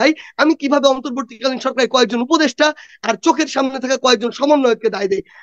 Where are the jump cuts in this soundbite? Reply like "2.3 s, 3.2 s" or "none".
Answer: none